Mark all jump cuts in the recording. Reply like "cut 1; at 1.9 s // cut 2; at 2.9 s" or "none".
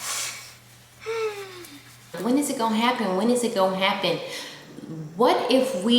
cut 1; at 2.2 s